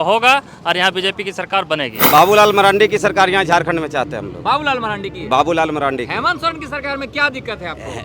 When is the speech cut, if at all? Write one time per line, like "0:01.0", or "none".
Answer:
0:02.0